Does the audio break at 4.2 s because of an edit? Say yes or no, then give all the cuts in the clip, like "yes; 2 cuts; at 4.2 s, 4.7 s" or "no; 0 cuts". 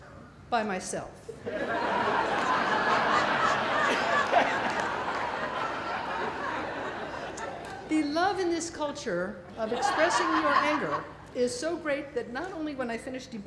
no; 1 cut; at 5.6 s